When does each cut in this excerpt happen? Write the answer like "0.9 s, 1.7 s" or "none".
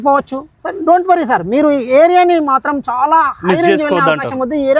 none